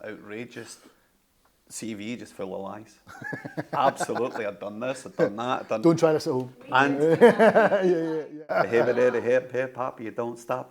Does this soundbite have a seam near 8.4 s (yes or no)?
yes